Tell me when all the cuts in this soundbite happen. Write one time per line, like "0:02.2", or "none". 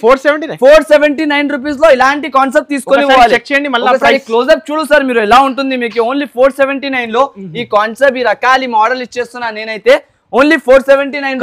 none